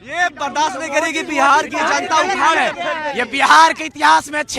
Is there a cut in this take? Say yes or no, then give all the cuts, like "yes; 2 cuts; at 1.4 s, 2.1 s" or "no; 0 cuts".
no; 0 cuts